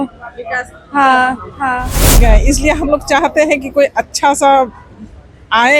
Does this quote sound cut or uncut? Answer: cut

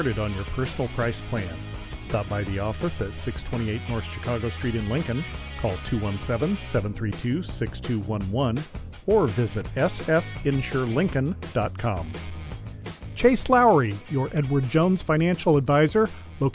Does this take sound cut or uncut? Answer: uncut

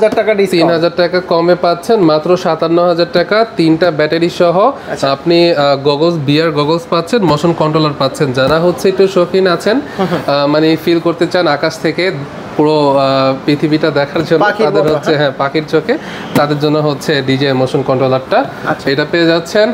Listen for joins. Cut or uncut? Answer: uncut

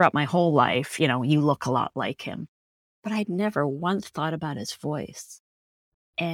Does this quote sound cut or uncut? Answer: uncut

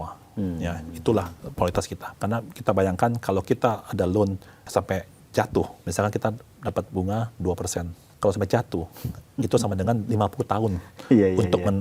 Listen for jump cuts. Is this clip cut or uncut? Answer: cut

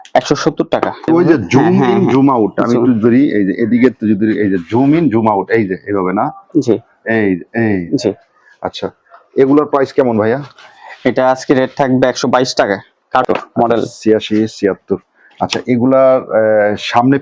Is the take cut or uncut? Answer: cut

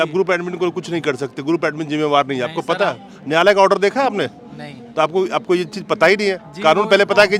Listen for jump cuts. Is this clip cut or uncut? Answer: uncut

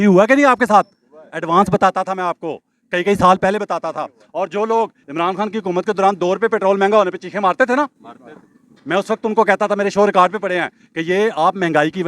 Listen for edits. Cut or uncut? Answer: uncut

